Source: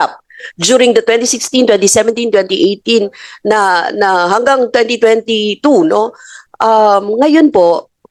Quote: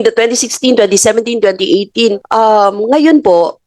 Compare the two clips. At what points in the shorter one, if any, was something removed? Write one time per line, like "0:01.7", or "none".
0:02.2